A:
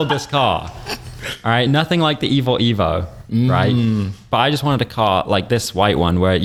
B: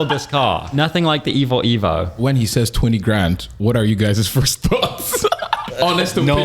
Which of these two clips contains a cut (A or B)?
B